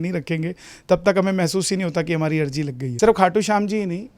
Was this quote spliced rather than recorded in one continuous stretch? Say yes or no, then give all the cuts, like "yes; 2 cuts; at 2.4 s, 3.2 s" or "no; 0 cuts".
yes; 1 cut; at 2.8 s